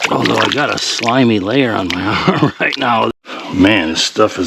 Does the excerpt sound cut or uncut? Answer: cut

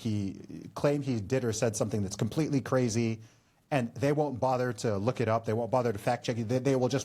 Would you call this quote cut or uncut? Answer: uncut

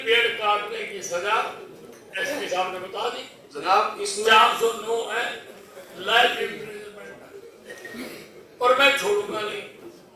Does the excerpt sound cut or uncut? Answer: uncut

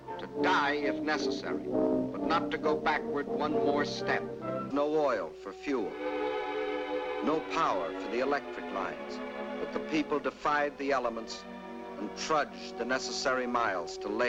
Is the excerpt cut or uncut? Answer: uncut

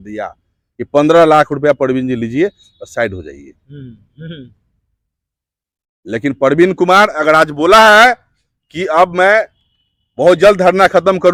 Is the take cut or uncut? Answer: uncut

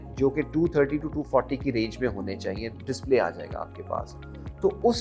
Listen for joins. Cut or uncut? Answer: uncut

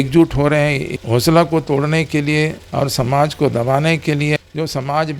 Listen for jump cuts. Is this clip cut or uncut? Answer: cut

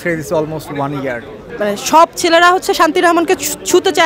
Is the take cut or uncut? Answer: cut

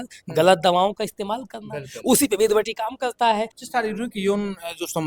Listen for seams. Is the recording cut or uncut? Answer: cut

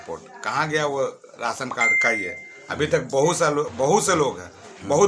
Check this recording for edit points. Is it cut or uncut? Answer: uncut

